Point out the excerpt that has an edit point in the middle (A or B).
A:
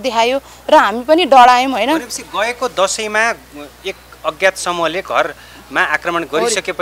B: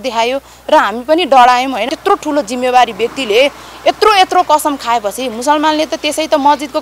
B